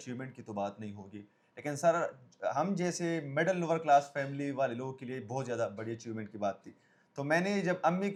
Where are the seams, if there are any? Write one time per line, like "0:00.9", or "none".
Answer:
none